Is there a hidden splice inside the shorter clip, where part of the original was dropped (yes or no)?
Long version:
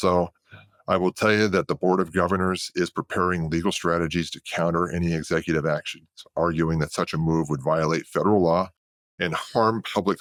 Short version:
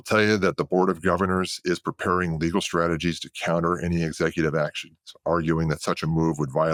no